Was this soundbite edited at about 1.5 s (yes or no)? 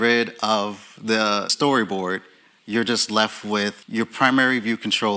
yes